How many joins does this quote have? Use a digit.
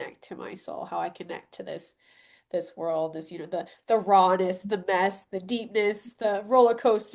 0